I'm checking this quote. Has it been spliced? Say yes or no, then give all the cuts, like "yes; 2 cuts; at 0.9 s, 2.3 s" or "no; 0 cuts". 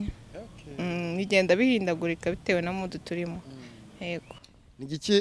no; 0 cuts